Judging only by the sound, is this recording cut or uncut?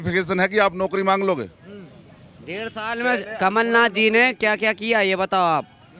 uncut